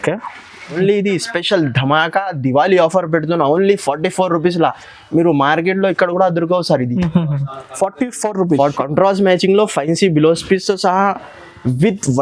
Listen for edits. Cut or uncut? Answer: cut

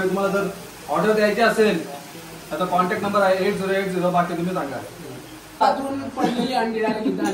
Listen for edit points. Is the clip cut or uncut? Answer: cut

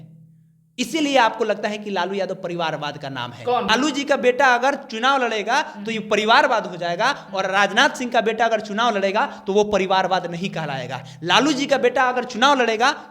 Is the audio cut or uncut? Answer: cut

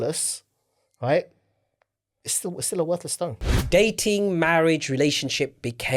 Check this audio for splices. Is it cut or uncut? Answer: cut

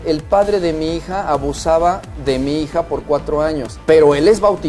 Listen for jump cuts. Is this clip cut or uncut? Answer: cut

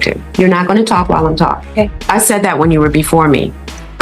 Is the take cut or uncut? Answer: cut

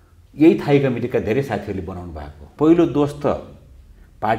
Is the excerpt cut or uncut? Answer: cut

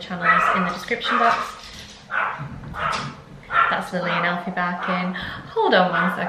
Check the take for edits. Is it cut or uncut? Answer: uncut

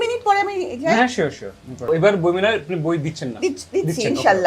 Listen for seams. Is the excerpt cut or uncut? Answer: cut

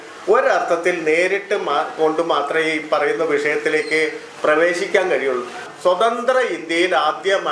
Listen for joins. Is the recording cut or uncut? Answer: cut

